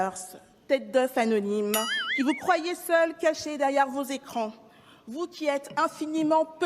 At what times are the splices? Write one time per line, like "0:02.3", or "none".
none